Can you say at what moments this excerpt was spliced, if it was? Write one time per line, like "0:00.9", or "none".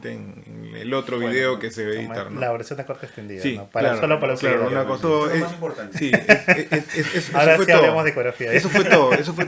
0:05.0